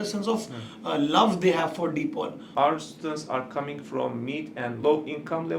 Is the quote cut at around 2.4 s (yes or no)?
yes